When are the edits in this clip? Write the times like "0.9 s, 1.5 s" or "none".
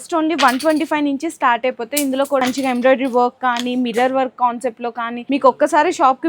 2.4 s, 5.1 s